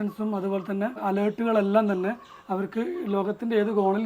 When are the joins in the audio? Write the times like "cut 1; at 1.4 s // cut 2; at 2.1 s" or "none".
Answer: cut 1; at 1.0 s